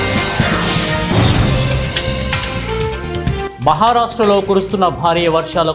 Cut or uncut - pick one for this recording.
uncut